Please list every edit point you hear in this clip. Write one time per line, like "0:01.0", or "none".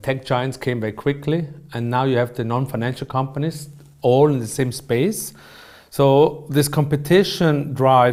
none